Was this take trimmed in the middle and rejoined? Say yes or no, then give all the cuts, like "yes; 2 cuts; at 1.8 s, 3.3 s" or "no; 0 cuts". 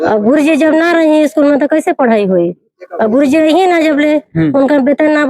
no; 0 cuts